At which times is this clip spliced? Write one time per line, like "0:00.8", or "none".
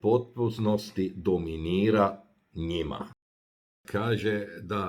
0:03.2